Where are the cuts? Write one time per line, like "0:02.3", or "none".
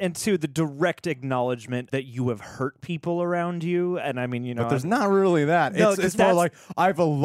0:01.9